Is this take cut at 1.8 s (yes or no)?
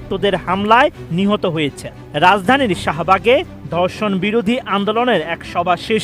no